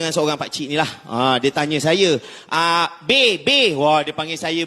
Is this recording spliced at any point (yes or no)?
no